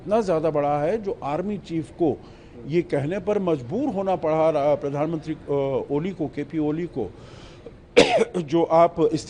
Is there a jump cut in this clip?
no; 0 cuts

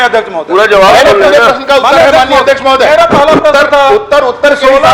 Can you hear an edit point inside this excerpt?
no; 0 cuts

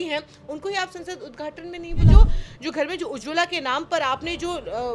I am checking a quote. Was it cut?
yes; 1 cut; at 2.1 s

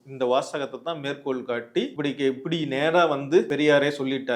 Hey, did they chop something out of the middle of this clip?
yes; 2 cuts; at 1.9 s, 3.5 s

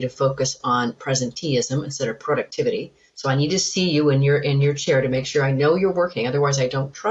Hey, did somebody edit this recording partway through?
no; 0 cuts

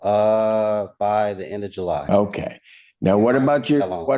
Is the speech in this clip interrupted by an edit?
yes; 1 cut; at 2.0 s

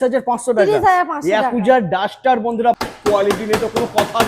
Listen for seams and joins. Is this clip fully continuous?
no; 1 cut; at 2.9 s

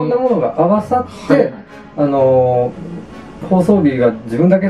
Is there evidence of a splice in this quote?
no; 0 cuts

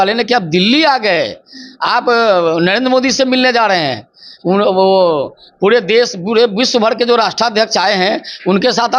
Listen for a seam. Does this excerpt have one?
no; 0 cuts

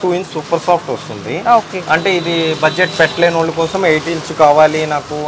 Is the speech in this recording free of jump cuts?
yes; 0 cuts

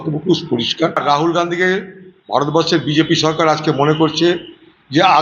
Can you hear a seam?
yes; 1 cut; at 1.0 s

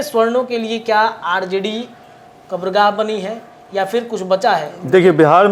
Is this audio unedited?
yes; 0 cuts

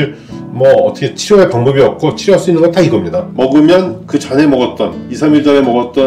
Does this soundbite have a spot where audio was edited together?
yes; 1 cut; at 3.3 s

